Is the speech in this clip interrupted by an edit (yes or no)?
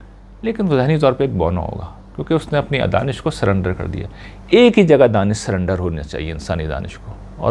no